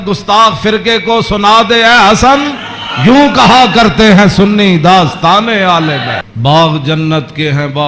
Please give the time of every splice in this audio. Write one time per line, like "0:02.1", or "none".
0:06.3